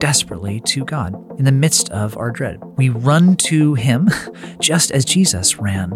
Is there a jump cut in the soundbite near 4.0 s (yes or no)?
no